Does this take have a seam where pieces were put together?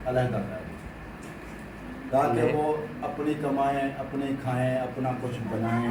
no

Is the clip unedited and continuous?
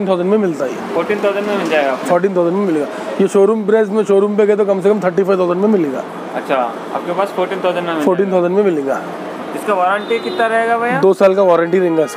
yes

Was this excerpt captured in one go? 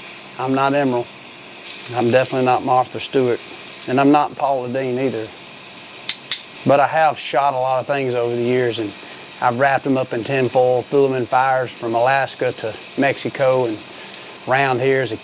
yes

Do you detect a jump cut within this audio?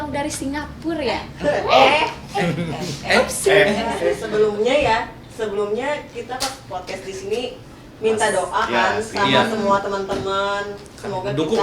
yes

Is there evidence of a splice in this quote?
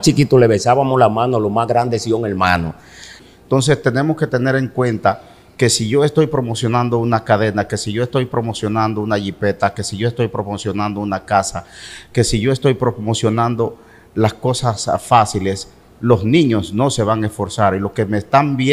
yes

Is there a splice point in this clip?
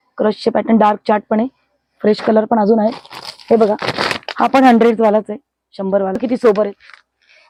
no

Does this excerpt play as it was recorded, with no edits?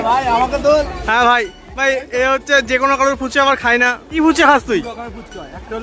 yes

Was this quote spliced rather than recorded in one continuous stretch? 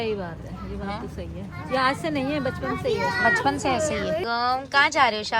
yes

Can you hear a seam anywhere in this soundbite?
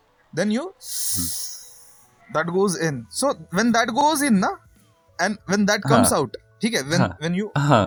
no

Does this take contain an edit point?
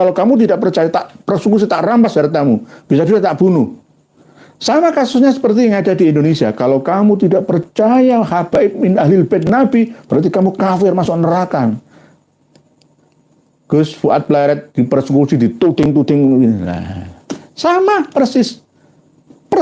no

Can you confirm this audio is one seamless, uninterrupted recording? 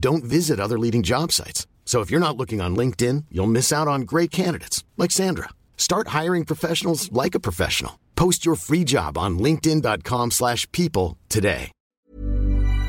no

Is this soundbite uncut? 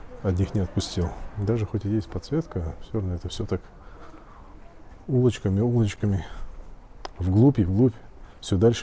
yes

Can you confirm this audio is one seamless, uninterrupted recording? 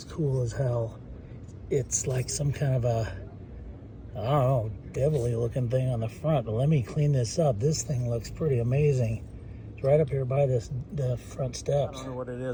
yes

